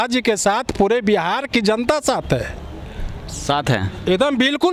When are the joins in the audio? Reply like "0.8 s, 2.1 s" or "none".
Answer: none